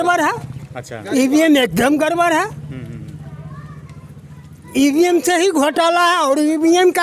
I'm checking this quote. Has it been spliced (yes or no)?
no